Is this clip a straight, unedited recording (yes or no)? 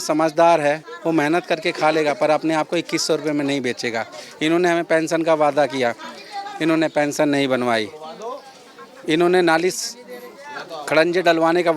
yes